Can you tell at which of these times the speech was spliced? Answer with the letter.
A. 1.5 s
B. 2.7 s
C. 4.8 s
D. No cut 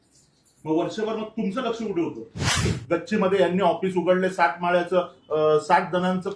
B